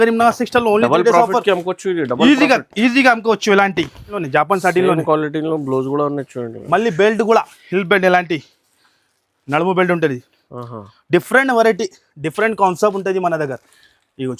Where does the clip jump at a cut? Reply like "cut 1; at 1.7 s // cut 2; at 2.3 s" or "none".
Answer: cut 1; at 4.2 s